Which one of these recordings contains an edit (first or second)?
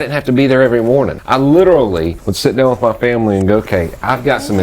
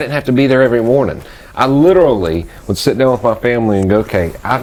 first